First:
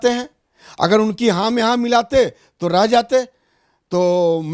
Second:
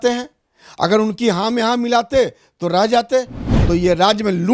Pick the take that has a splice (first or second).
second